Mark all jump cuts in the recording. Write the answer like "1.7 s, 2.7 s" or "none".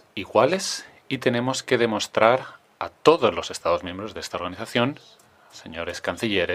none